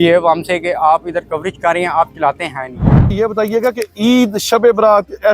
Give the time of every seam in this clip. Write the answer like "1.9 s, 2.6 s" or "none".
3.1 s